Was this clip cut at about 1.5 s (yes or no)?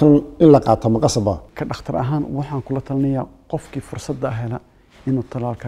yes